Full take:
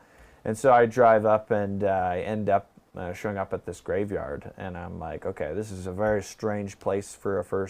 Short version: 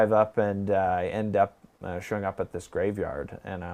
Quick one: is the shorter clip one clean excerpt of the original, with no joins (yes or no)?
yes